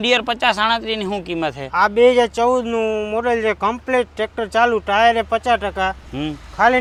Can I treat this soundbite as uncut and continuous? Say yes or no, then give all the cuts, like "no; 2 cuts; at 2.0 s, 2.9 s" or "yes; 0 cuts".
yes; 0 cuts